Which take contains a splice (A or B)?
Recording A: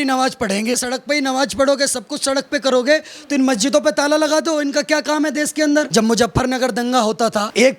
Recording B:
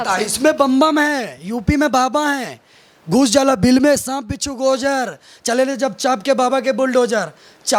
A